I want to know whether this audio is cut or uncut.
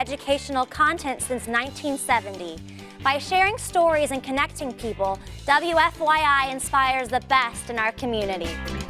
uncut